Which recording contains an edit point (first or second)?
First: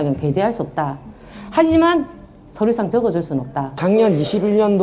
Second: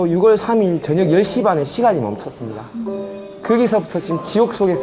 first